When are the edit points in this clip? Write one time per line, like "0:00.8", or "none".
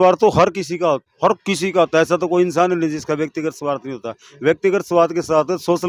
none